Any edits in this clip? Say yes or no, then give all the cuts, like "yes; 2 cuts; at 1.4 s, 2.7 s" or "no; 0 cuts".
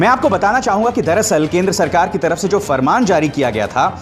no; 0 cuts